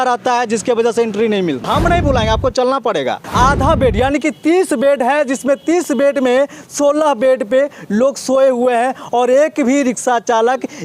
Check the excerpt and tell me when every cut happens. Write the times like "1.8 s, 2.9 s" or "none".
1.6 s, 3.2 s